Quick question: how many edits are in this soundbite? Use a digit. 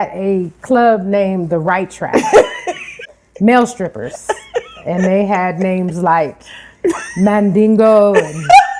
1